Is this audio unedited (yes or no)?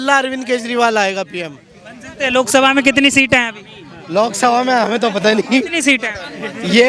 yes